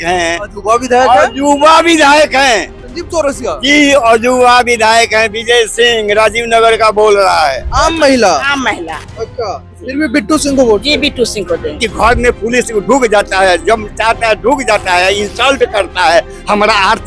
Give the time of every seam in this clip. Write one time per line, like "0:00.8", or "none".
0:07.6
0:11.8